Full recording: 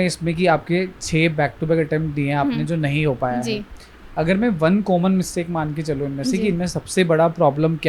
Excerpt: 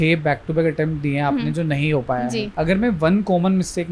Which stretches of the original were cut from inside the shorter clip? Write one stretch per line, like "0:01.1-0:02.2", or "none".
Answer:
0:03.6-0:04.1